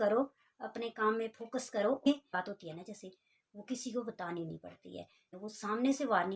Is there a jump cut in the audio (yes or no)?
yes